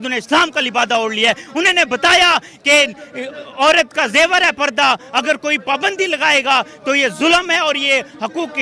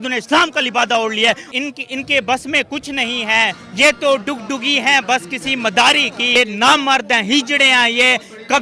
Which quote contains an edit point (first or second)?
second